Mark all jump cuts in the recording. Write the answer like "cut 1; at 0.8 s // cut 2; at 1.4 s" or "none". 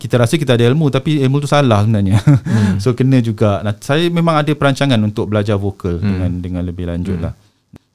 none

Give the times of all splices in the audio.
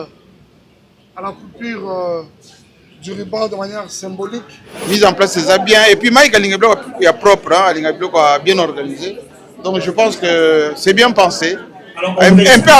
cut 1; at 4.7 s

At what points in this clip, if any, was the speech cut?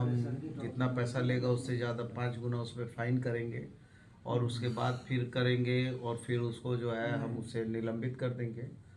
none

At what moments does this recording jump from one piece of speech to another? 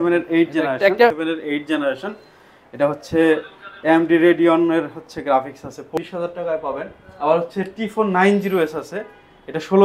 cut 1; at 1.1 s // cut 2; at 5.9 s

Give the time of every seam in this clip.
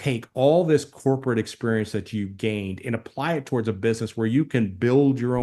none

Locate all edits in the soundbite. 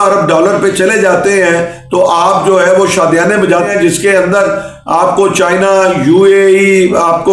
cut 1; at 3.7 s

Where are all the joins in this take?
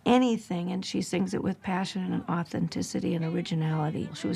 none

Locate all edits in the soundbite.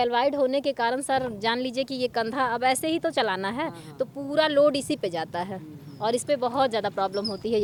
none

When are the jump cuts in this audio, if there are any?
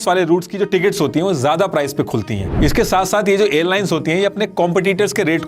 cut 1; at 2.4 s

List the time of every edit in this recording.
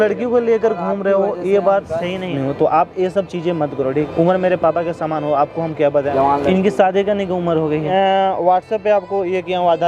cut 1; at 2.3 s // cut 2; at 3.9 s // cut 3; at 6.1 s // cut 4; at 7.9 s

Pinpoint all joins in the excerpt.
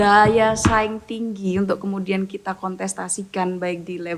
none

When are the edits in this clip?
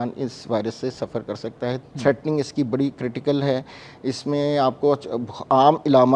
cut 1; at 1.8 s

